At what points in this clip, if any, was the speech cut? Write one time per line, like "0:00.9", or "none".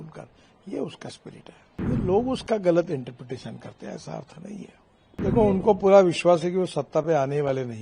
0:01.7
0:05.2